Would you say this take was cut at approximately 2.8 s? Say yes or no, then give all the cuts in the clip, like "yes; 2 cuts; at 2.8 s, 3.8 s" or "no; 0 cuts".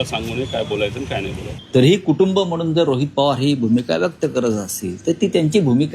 no; 1 cut; at 1.5 s